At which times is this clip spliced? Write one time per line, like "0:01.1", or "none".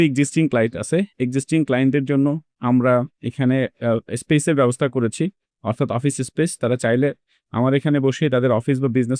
none